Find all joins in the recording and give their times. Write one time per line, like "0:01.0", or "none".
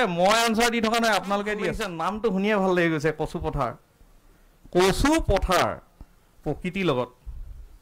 0:01.9